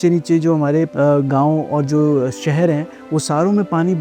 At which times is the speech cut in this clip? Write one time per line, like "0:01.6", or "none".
0:00.9